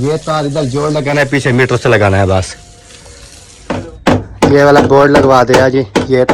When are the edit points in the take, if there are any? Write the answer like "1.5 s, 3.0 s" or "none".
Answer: 3.5 s